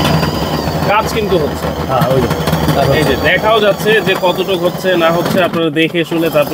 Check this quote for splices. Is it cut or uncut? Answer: uncut